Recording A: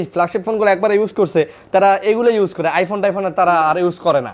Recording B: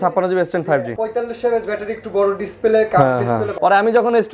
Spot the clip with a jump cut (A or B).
B